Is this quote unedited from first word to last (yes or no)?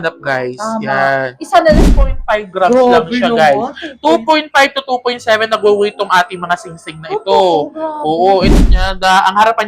no